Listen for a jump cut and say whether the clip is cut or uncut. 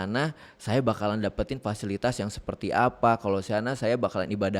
uncut